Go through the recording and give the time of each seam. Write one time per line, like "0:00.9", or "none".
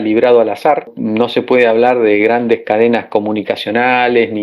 0:01.0